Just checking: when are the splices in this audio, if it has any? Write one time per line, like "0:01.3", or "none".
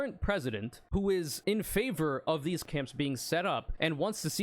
0:01.1
0:02.6